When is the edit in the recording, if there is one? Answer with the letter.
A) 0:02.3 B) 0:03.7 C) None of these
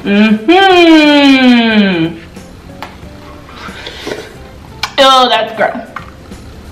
C